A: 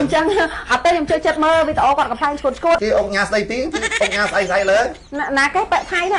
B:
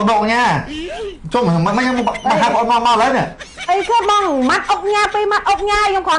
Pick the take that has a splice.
A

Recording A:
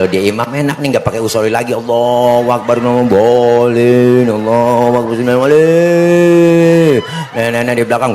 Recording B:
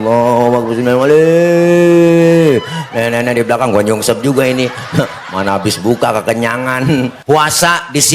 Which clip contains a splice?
B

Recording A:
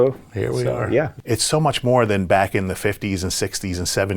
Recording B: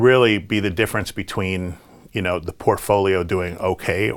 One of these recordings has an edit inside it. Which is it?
A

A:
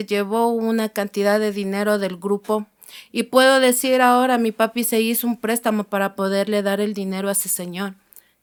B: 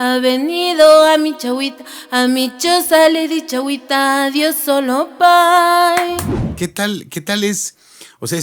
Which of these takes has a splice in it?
B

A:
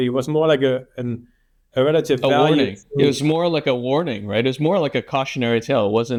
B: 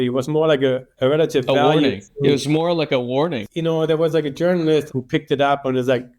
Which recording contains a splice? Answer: B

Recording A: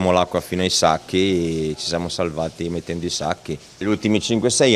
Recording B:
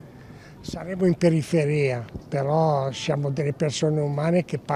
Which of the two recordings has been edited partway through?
A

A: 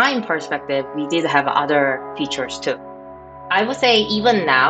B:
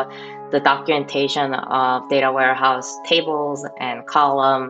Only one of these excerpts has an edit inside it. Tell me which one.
A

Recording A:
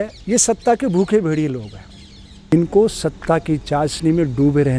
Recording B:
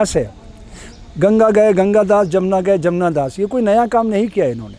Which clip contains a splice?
A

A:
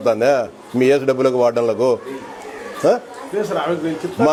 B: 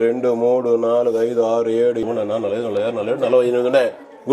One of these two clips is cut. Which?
B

